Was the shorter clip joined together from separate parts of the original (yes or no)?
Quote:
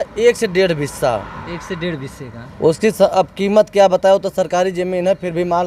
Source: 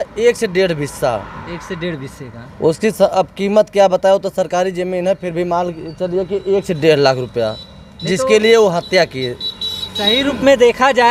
no